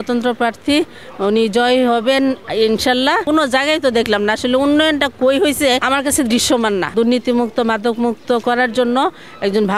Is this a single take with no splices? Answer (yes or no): no